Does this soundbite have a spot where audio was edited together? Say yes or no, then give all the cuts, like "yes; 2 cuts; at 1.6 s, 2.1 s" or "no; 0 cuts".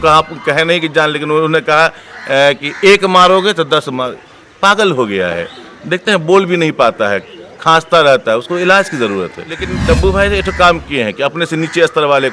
yes; 1 cut; at 9.7 s